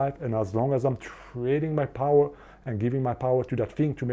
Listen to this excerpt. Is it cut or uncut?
uncut